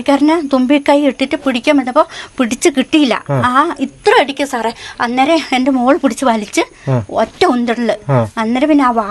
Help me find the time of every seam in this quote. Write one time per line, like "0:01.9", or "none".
none